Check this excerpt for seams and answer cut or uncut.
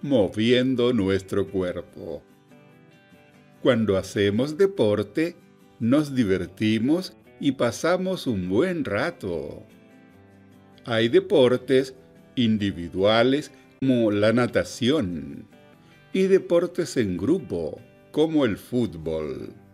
cut